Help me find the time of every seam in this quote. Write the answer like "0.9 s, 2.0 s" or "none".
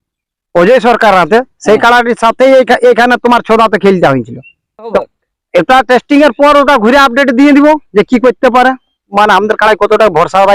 5.0 s, 9.0 s